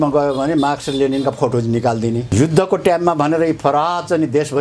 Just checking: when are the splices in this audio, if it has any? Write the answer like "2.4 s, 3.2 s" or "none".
2.3 s

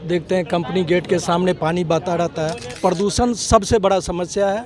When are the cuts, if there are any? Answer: 2.7 s

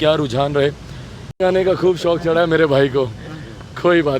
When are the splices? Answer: 1.3 s

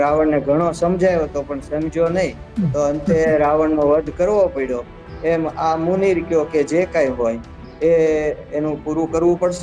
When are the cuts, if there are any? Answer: none

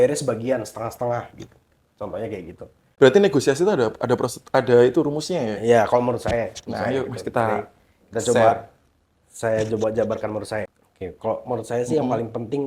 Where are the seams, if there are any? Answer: 2.8 s, 10.8 s

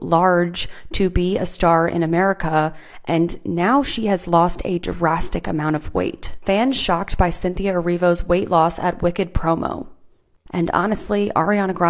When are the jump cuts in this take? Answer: 6.3 s

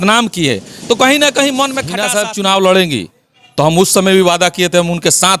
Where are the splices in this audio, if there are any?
1.9 s

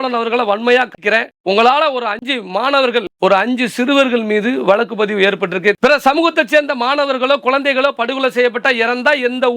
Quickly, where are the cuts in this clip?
5.8 s

